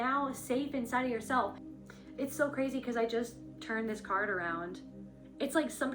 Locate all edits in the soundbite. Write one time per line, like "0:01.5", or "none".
0:01.6